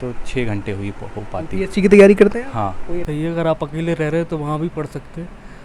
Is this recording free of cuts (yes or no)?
no